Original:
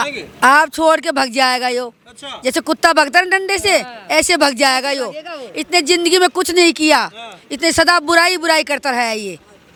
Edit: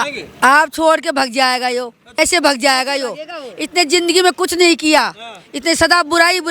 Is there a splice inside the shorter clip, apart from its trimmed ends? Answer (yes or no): yes